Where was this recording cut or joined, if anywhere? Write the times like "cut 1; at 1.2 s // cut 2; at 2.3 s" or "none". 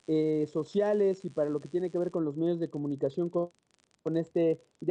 cut 1; at 3.2 s